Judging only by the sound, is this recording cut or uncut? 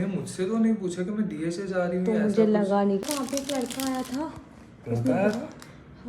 cut